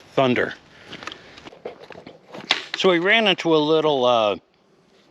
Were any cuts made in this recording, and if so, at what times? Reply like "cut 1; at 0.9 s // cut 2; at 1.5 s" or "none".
cut 1; at 1.5 s